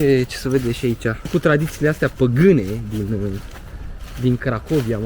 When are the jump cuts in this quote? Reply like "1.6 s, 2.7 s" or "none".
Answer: 1.3 s